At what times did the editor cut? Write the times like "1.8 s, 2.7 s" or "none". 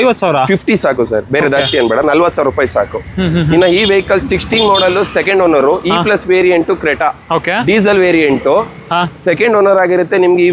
none